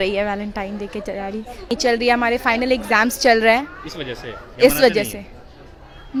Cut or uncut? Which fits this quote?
uncut